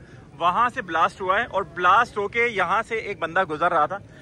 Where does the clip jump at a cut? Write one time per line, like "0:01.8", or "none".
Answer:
none